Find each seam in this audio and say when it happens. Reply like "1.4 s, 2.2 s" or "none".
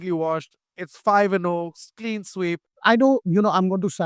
2.7 s